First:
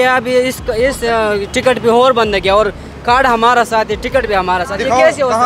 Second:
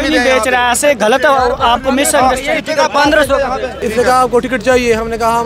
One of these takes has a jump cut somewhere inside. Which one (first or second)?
second